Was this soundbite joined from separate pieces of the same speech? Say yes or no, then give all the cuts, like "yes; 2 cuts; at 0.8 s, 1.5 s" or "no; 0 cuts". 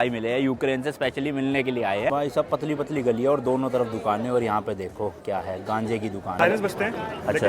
yes; 2 cuts; at 2.1 s, 6.4 s